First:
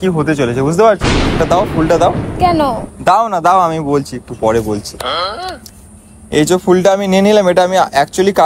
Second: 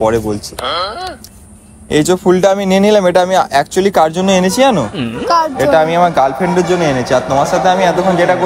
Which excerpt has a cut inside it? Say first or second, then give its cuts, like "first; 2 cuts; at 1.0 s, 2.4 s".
first; 1 cut; at 1.3 s